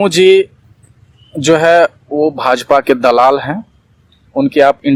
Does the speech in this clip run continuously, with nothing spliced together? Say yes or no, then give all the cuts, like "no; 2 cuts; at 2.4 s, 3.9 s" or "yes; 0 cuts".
yes; 0 cuts